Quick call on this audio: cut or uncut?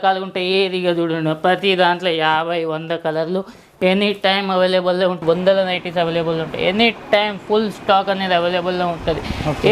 cut